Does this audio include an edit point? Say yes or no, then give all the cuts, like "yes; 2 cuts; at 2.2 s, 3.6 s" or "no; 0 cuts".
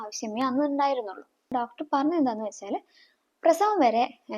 yes; 1 cut; at 1.5 s